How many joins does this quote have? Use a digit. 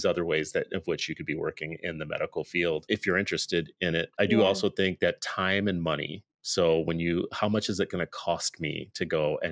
2